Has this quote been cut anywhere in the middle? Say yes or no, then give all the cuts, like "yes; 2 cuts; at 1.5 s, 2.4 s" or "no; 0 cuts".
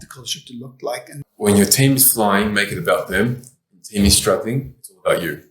yes; 1 cut; at 1.1 s